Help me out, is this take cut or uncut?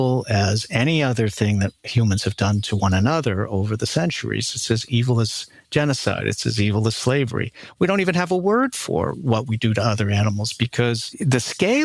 uncut